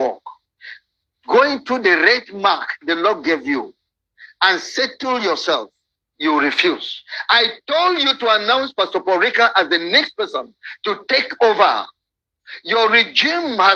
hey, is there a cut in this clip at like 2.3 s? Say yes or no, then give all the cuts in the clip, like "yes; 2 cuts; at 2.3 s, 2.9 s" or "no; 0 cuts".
no; 0 cuts